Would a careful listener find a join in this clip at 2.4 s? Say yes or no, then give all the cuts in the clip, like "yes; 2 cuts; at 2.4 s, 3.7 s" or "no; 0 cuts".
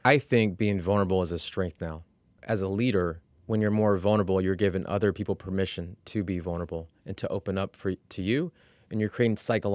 yes; 2 cuts; at 2.4 s, 3.3 s